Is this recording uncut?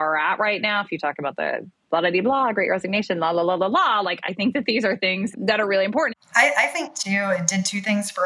no; 2 cuts; at 5.3 s, 6.1 s

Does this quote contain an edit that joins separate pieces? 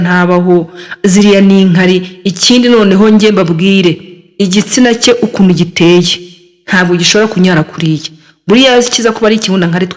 no; 0 cuts

